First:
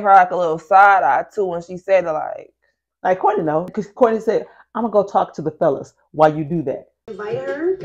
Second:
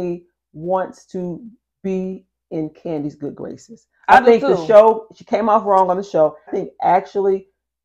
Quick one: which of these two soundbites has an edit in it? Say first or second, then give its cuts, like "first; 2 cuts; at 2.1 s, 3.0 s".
second; 1 cut; at 6.5 s